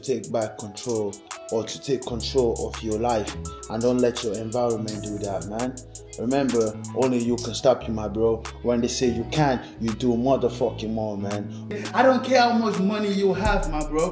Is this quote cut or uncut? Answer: cut